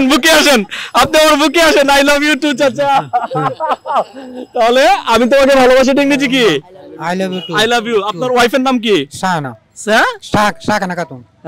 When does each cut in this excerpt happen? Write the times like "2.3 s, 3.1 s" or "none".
none

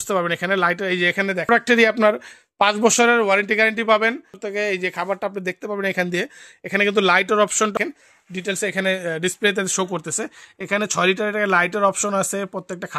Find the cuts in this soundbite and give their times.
1.5 s, 4.4 s, 7.7 s

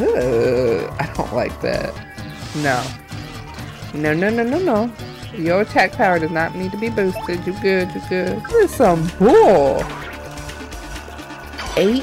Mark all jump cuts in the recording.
2.0 s, 8.4 s

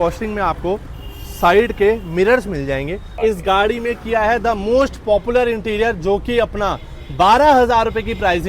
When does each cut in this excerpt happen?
3.2 s

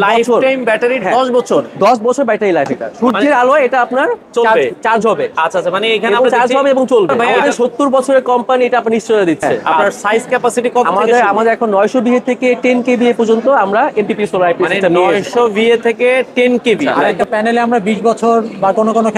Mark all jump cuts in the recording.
2.8 s, 7.3 s, 9.5 s, 17.1 s

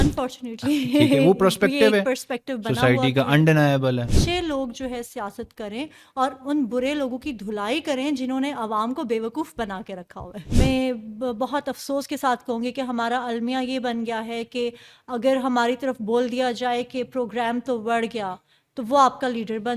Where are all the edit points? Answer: 4.1 s, 10.3 s

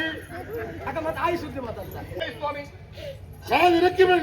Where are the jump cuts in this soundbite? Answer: 2.2 s

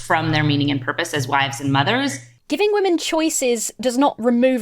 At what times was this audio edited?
2.3 s

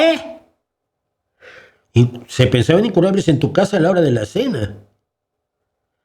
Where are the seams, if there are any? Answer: none

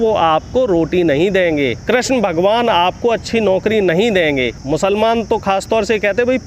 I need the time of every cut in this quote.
1.8 s, 4.6 s

